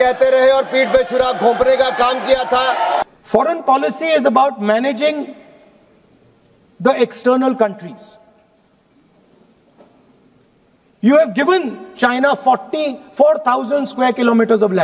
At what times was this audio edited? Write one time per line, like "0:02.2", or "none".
0:03.0